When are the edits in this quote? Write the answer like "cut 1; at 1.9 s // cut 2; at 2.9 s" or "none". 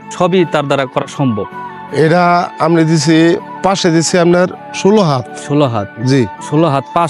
cut 1; at 1.8 s

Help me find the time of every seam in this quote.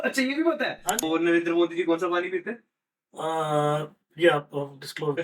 cut 1; at 1.0 s

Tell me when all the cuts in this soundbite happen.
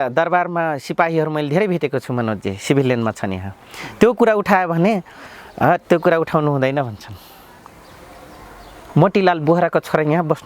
none

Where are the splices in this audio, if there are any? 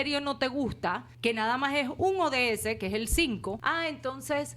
cut 1; at 1.1 s // cut 2; at 3.6 s

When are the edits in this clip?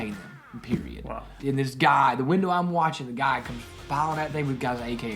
cut 1; at 1.4 s

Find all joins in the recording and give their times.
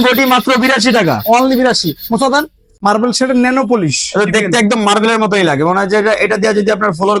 cut 1; at 2.6 s

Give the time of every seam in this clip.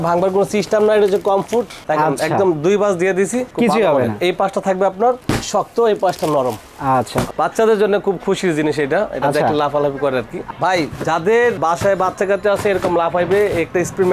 cut 1; at 7.3 s // cut 2; at 10.4 s

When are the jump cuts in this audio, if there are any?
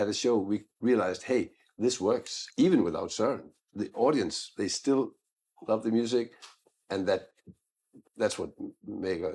none

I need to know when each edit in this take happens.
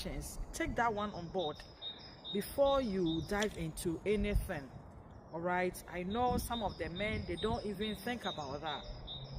none

